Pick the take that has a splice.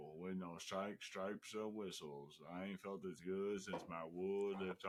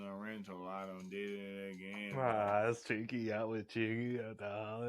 second; 1 cut; at 2.1 s

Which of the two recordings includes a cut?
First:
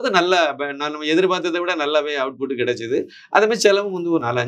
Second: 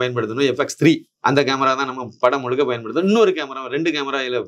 second; 1 cut; at 1.1 s

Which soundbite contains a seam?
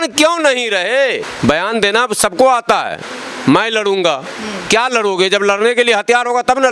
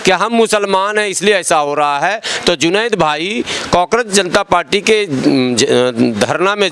first; 1 cut; at 1.3 s

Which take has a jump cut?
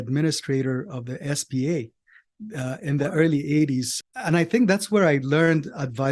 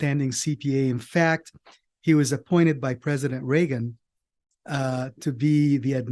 first; 1 cut; at 3.9 s

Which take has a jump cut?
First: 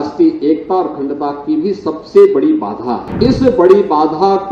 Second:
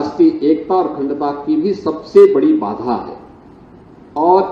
first; 1 cut; at 3.1 s

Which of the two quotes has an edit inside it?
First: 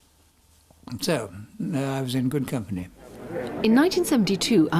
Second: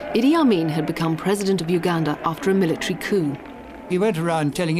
first; 1 cut; at 2.7 s

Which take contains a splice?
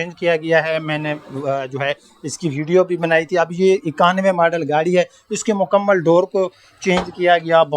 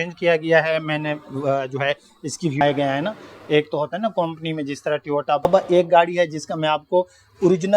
second; 2 cuts; at 2.6 s, 5.4 s

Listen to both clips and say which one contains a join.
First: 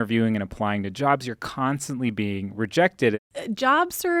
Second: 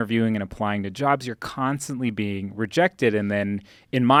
first; 1 cut; at 3.2 s

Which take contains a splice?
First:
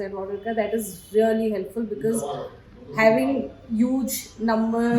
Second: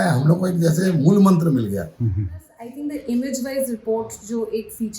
second; 1 cut; at 2.5 s

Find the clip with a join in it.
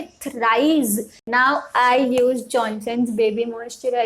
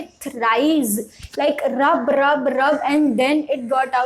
first; 1 cut; at 1.2 s

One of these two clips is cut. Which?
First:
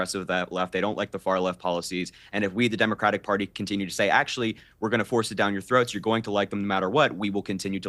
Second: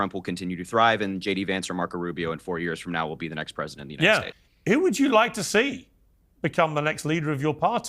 second; 1 cut; at 4.4 s

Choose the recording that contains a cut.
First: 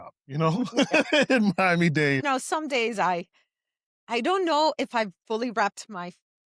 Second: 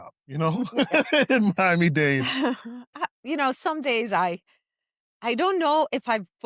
first; 1 cut; at 2.2 s

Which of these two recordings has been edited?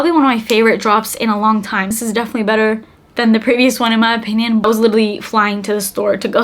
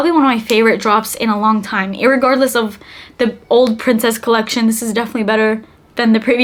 first; 2 cuts; at 2.0 s, 4.6 s

